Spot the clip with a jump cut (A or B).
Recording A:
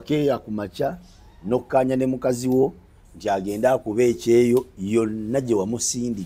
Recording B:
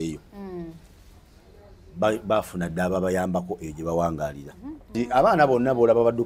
B